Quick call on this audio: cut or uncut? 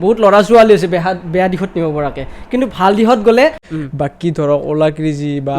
cut